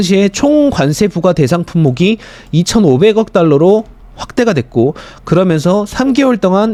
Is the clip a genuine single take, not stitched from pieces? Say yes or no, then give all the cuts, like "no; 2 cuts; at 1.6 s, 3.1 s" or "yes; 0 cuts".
yes; 0 cuts